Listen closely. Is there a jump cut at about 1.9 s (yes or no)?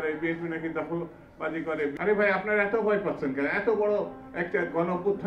yes